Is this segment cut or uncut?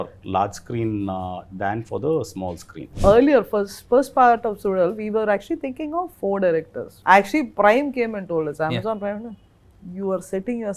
cut